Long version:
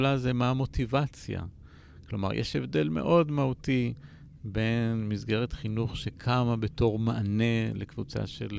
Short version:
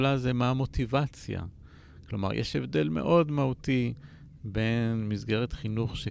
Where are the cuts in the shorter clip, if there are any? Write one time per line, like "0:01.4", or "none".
none